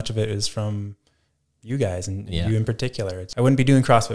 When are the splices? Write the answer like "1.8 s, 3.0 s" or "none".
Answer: 3.2 s